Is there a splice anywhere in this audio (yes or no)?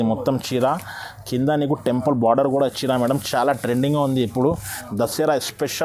no